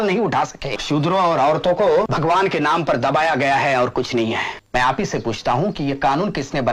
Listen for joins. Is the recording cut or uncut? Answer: cut